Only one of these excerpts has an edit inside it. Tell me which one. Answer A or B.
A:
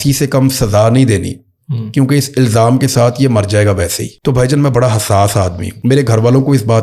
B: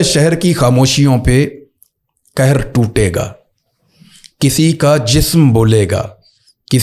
A